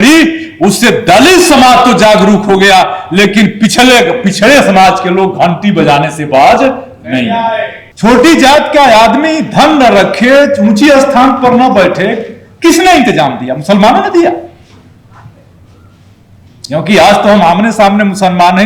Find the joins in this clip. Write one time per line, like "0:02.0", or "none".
0:07.8